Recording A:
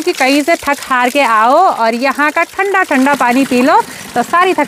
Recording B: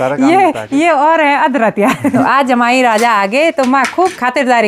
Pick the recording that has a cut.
B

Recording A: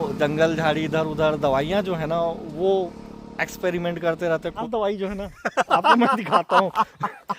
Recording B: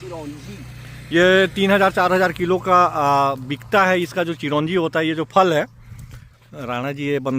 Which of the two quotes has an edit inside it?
A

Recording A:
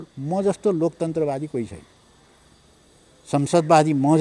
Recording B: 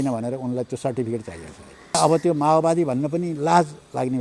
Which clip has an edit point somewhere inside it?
B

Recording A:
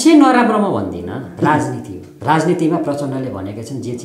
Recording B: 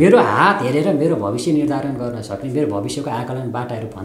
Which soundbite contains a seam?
A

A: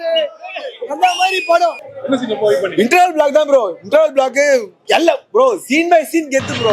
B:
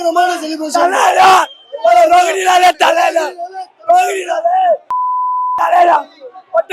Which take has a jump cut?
A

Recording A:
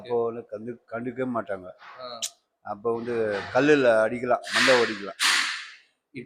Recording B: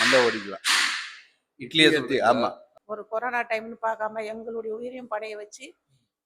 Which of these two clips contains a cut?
B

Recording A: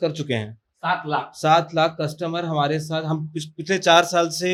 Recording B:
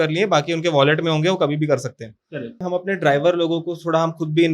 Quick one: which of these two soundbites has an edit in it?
B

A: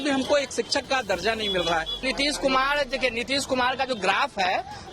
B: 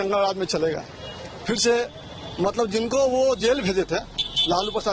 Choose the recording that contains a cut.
A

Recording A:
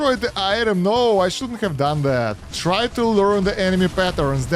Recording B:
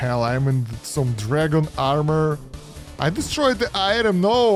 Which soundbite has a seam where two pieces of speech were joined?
A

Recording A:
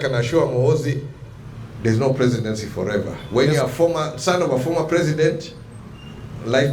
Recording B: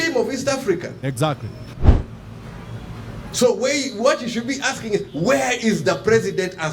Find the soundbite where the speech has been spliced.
B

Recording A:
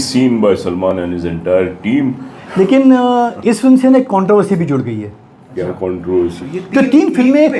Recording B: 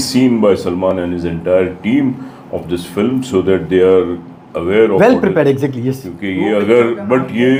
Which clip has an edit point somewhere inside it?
A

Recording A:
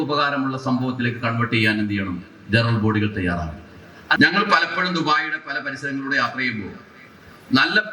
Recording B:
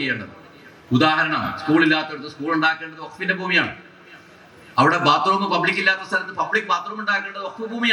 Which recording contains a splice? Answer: A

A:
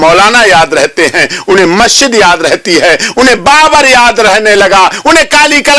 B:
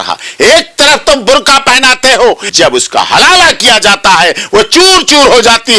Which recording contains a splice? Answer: B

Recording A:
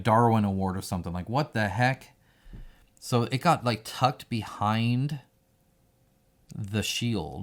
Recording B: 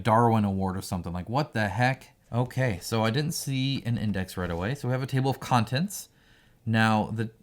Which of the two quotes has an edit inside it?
B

